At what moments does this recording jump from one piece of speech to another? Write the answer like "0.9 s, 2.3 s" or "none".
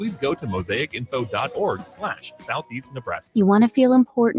3.2 s